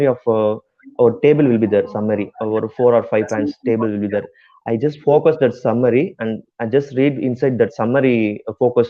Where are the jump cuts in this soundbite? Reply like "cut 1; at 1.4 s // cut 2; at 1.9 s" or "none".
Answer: none